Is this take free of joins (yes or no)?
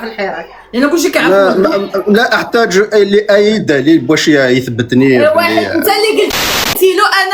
yes